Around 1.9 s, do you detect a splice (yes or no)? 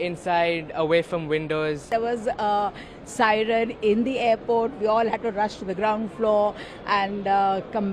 yes